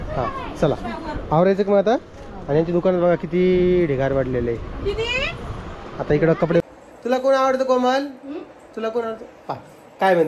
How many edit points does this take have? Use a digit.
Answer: 1